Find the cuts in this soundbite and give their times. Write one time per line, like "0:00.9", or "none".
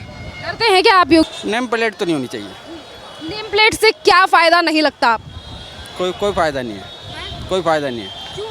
0:01.2